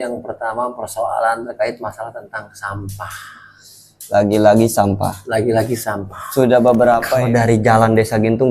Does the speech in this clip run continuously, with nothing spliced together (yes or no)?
no